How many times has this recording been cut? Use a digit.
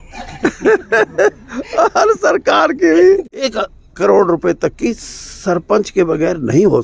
1